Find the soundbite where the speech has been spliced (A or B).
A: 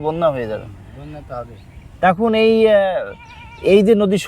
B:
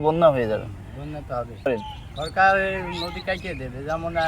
B